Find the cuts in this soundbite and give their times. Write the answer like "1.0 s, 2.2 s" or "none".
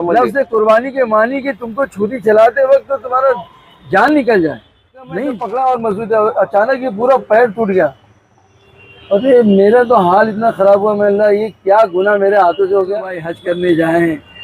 5.2 s, 13.3 s